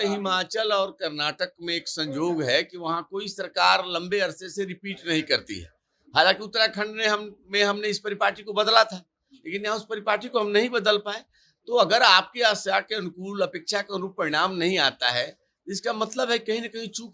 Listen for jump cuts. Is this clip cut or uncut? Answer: uncut